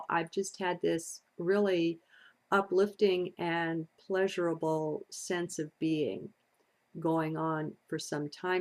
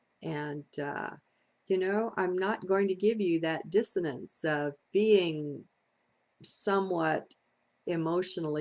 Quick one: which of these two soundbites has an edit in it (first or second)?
second